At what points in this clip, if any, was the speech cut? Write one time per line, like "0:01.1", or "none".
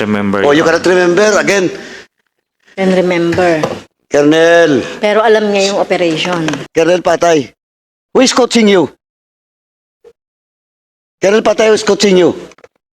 0:06.6